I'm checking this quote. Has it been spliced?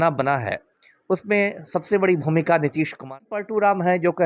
yes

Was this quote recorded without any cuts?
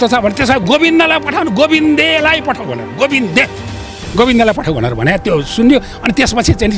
yes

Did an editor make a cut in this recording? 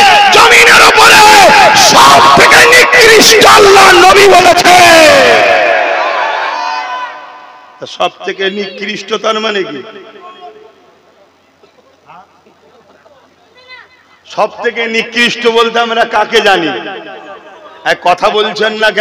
yes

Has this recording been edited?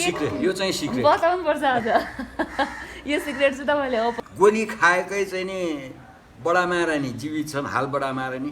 yes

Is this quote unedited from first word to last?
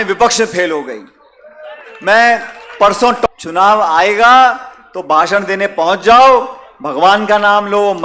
no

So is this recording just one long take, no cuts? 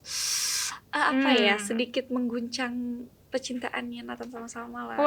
yes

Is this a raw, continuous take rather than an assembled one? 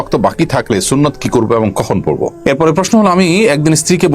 no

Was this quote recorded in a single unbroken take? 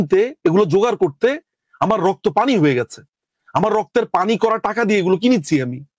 yes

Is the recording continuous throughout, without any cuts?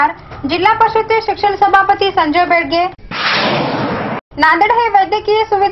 yes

